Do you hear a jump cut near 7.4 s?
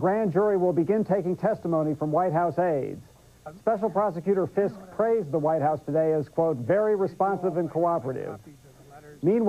yes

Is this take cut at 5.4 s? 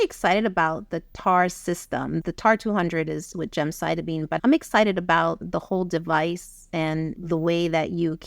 yes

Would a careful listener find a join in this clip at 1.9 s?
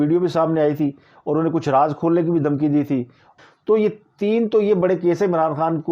no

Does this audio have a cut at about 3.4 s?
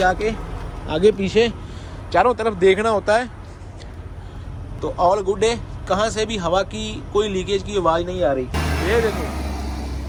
no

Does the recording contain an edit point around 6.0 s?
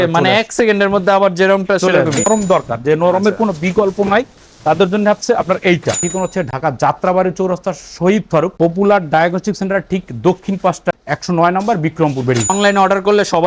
yes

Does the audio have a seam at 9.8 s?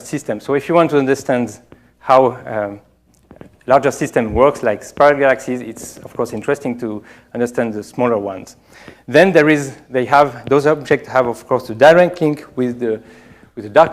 yes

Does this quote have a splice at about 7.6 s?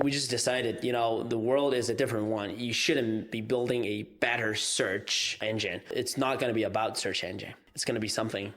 yes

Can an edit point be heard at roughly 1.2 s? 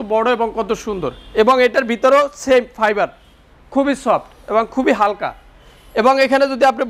no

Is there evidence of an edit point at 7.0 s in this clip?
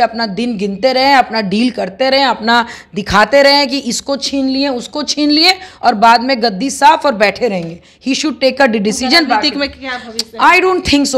no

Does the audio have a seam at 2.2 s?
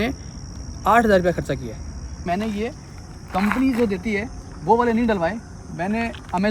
yes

